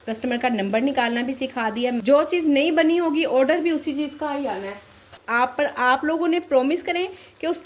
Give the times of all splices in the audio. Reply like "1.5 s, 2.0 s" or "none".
2.0 s, 5.1 s